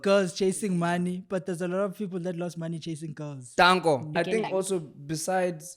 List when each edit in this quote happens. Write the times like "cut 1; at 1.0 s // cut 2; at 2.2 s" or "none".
cut 1; at 4.1 s